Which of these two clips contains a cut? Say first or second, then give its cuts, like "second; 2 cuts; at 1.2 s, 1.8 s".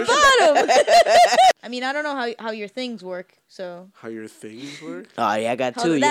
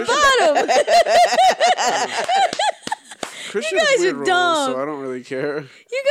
first; 1 cut; at 1.6 s